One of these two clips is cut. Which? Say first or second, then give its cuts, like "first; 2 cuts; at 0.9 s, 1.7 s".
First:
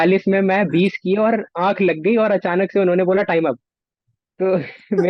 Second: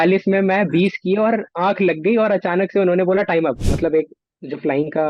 second; 1 cut; at 3.7 s